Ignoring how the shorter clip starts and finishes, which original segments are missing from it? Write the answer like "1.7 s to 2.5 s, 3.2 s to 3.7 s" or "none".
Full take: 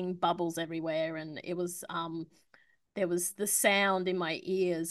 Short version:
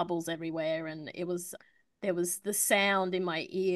1.8 s to 2.5 s